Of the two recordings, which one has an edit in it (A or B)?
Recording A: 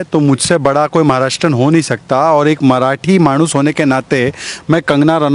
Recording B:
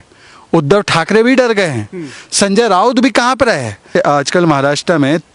B